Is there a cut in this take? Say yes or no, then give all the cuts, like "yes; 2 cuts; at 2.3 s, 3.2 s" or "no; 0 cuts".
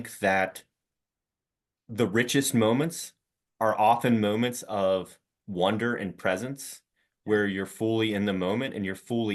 no; 0 cuts